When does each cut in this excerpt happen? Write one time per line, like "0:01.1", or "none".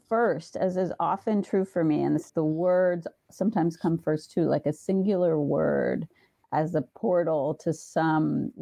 0:02.3